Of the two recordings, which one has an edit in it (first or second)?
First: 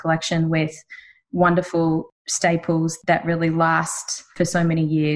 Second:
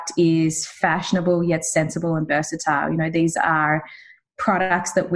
first